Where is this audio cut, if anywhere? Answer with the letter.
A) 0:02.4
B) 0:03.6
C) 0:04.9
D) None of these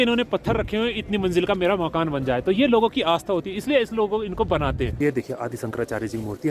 C